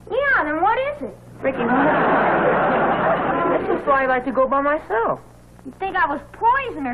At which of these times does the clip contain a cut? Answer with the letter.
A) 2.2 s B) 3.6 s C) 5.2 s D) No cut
B